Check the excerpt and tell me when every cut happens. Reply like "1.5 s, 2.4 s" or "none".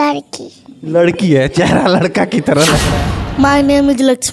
2.9 s